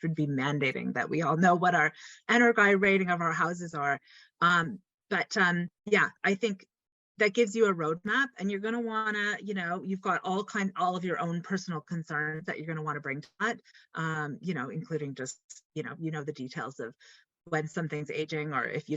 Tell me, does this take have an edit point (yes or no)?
no